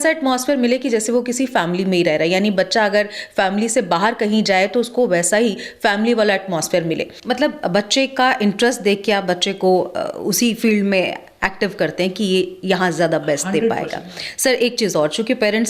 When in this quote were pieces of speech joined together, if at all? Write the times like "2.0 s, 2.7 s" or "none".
7.2 s